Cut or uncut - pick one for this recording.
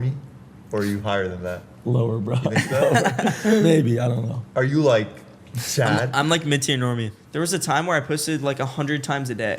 cut